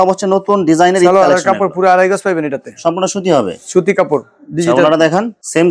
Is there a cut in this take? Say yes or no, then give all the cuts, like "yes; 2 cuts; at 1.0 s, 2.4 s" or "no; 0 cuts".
no; 0 cuts